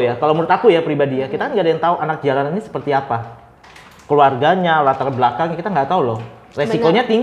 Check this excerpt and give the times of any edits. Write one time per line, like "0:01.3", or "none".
none